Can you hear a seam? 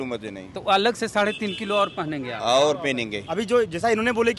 yes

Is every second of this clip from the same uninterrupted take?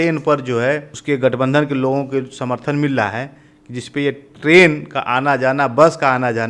no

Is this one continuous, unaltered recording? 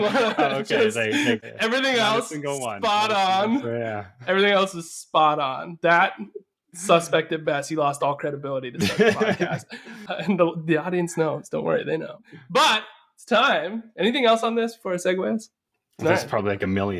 no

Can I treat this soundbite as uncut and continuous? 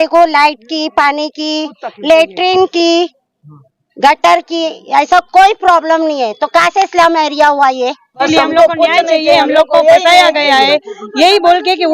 no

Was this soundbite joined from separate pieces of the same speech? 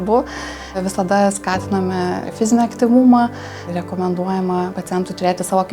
yes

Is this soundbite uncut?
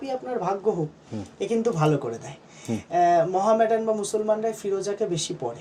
yes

